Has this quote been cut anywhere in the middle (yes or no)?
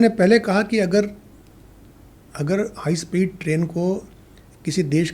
no